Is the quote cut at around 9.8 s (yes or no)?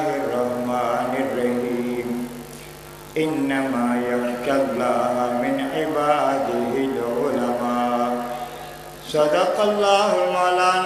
no